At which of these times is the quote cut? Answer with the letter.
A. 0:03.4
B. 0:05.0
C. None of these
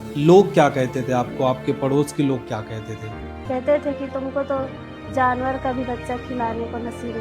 A